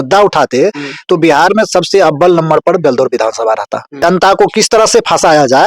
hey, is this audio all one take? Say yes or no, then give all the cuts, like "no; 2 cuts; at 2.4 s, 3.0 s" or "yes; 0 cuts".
no; 1 cut; at 4.0 s